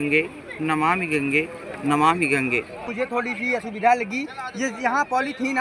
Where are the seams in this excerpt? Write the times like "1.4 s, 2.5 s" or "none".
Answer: 2.9 s